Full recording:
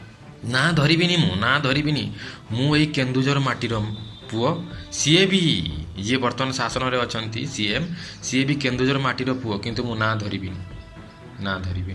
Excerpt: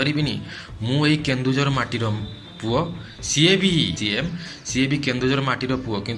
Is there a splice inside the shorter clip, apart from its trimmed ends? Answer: yes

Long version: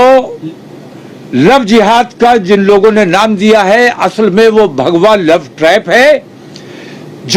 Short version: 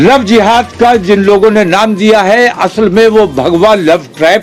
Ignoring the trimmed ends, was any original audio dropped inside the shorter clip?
no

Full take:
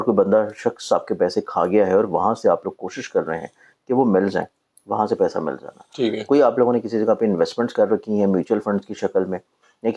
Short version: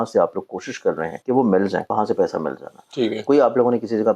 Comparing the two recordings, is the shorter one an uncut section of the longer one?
no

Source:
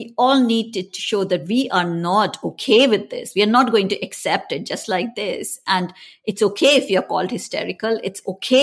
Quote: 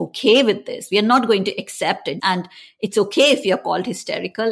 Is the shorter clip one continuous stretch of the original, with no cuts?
no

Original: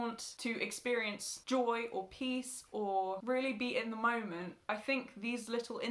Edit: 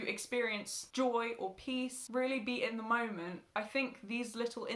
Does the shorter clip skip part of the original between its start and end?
yes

